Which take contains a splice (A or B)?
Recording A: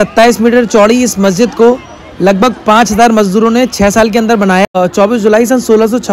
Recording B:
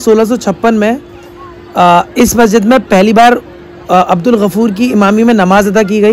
A